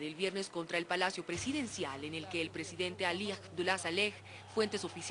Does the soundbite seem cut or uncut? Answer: uncut